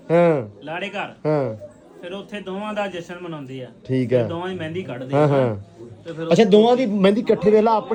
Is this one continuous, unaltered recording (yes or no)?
yes